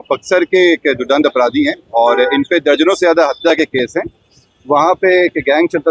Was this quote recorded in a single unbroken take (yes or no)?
yes